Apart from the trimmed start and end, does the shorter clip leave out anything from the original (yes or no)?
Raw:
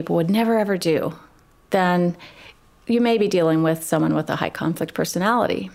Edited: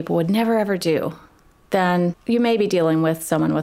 yes